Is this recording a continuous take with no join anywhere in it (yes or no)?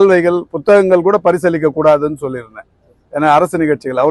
yes